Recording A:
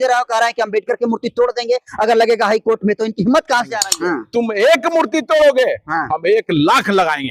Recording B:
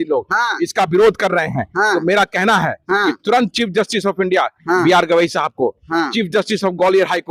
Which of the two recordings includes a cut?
A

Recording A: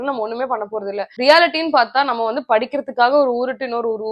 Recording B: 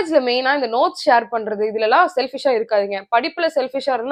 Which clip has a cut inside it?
A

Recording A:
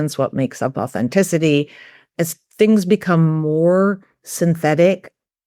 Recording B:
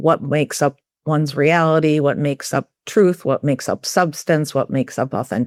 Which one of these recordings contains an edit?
A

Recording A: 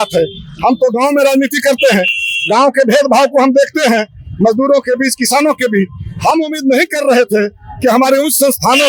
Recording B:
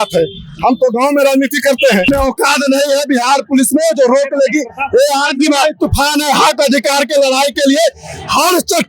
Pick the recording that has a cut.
B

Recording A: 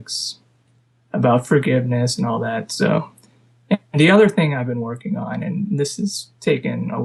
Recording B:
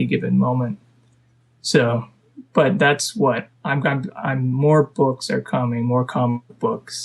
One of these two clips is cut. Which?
B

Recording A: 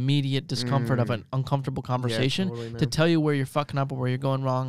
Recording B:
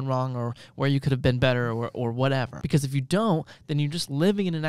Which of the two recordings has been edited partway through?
B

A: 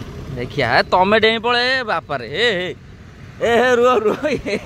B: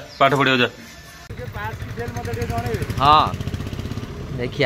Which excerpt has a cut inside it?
B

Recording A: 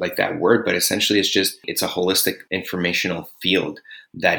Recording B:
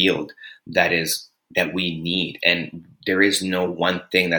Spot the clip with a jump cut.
A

